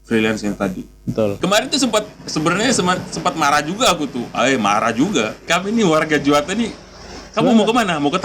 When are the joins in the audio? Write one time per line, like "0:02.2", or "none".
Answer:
0:01.4
0:05.5